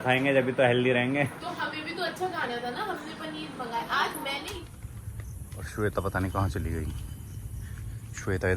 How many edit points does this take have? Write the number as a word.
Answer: one